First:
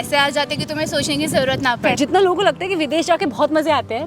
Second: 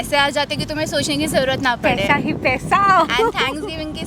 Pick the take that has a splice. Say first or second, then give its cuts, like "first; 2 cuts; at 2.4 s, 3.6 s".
first; 1 cut; at 2.0 s